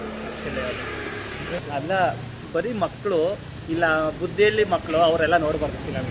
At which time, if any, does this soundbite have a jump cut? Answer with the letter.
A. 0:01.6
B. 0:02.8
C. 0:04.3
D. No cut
A